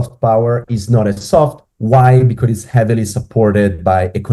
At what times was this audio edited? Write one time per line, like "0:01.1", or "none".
none